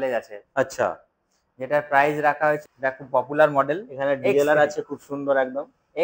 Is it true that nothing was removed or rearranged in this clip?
no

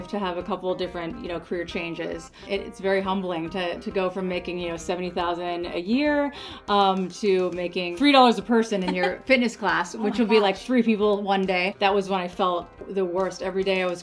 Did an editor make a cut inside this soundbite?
yes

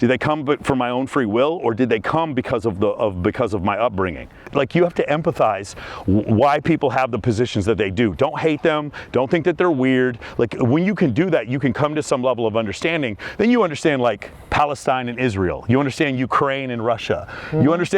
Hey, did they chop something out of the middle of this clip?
yes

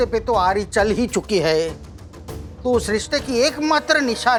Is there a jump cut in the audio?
no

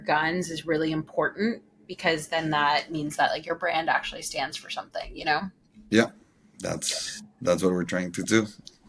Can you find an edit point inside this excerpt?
no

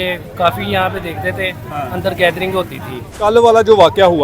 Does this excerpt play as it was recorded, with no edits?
no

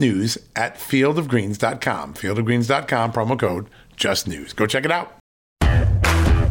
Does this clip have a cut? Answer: yes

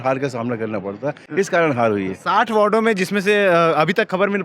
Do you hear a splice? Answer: no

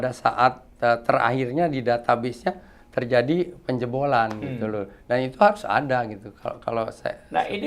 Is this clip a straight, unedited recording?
yes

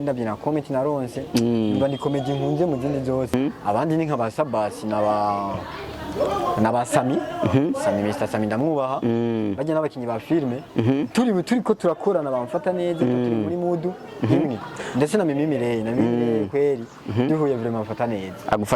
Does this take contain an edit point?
yes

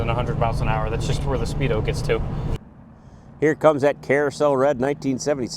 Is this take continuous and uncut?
no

